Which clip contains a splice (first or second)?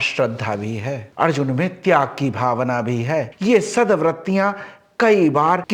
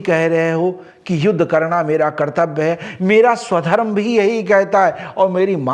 first